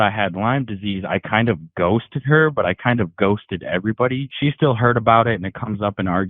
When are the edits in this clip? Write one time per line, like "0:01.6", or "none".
0:04.3